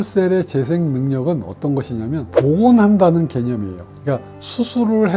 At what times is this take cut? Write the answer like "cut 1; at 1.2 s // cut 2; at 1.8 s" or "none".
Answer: none